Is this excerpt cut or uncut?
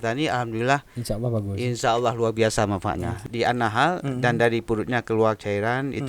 cut